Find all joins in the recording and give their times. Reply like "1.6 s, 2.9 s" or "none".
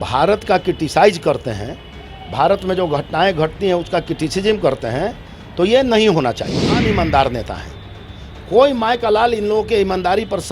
6.7 s